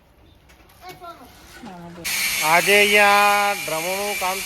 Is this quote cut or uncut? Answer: cut